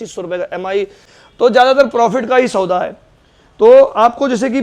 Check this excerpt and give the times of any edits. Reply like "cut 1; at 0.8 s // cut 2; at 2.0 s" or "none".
cut 1; at 1.0 s